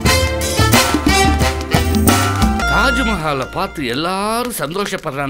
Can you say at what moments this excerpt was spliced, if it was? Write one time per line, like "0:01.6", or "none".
0:02.6